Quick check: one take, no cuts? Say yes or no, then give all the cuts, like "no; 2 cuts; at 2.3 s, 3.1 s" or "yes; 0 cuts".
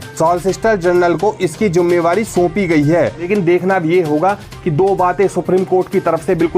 no; 1 cut; at 3.3 s